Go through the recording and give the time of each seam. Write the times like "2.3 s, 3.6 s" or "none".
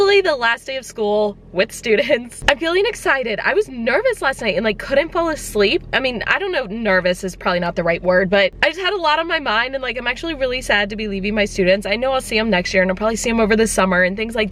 none